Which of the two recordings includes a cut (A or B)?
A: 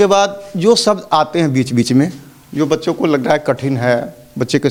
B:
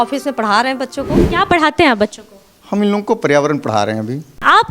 B